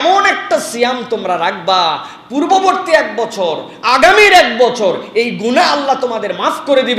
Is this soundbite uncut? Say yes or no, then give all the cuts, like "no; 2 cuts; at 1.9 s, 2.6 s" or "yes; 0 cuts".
yes; 0 cuts